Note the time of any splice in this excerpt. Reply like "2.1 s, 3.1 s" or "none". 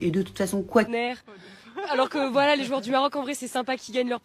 0.9 s